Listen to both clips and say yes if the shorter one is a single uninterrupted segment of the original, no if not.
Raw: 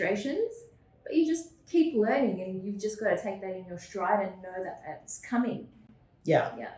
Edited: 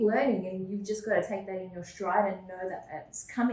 yes